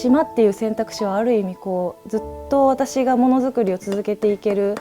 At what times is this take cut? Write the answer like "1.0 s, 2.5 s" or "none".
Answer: none